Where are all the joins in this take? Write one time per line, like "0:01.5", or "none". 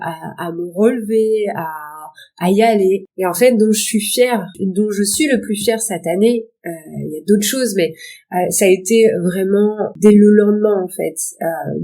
none